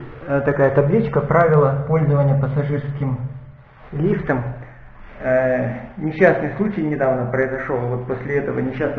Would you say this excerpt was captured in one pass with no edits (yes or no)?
yes